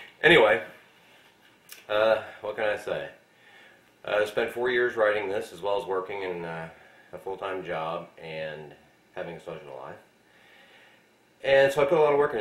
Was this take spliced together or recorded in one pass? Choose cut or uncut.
uncut